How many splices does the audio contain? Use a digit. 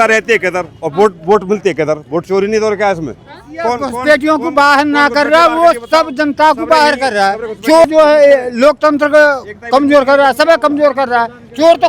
2